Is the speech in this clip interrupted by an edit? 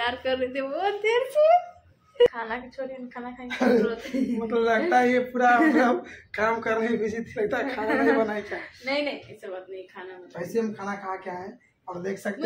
yes; 1 cut; at 2.3 s

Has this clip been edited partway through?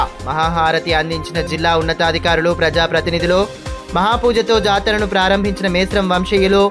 no; 0 cuts

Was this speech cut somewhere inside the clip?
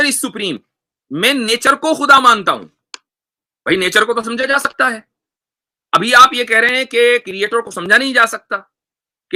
no; 0 cuts

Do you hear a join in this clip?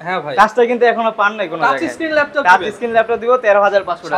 no; 0 cuts

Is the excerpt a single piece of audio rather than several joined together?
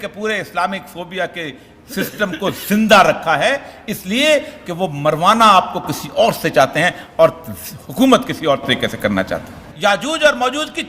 no; 1 cut; at 9.7 s

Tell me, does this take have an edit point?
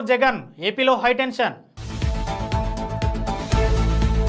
no; 0 cuts

